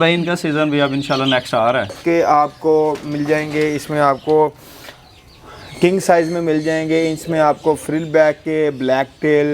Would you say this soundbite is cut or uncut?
cut